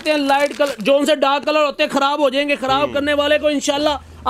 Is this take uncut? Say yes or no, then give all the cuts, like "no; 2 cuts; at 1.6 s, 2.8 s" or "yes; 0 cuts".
yes; 0 cuts